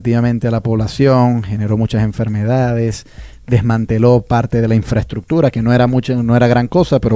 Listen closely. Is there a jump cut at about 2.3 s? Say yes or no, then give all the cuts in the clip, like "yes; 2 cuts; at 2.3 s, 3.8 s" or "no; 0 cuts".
yes; 1 cut; at 2.3 s